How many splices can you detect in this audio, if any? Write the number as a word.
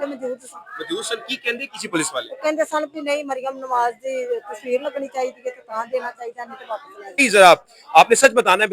one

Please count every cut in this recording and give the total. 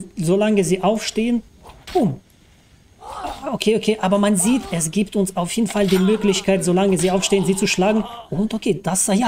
one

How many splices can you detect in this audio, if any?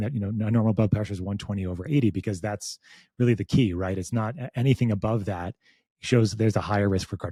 zero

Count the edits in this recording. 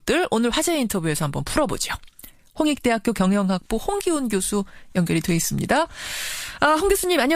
one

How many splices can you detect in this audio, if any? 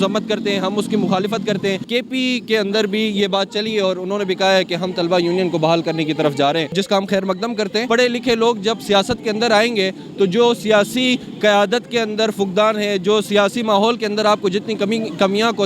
three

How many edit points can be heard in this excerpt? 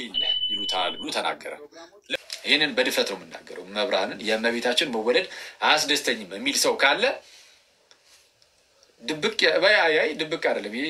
one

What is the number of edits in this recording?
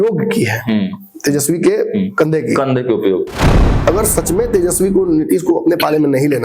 one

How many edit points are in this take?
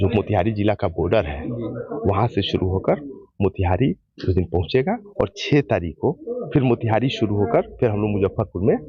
one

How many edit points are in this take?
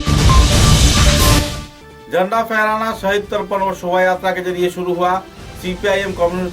one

